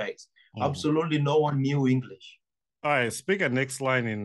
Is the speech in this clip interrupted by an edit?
yes; 1 cut; at 2.7 s

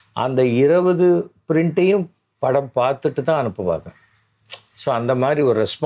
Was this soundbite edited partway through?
no; 0 cuts

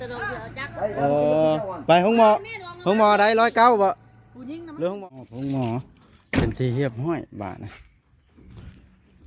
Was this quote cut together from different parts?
yes; 1 cut; at 4.9 s

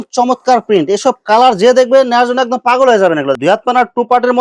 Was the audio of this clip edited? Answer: yes; 1 cut; at 3.3 s

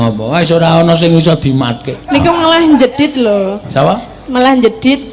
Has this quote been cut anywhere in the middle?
no; 0 cuts

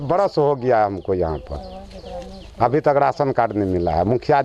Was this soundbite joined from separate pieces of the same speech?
no; 0 cuts

